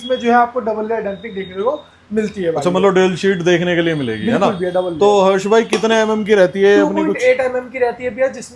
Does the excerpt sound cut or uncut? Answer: uncut